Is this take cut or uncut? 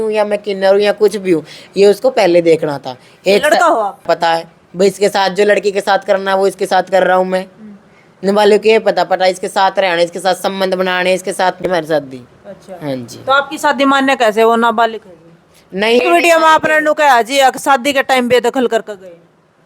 cut